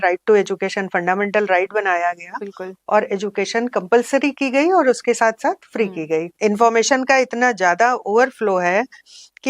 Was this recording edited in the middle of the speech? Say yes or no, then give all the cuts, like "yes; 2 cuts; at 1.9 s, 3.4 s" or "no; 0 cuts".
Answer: yes; 1 cut; at 6.3 s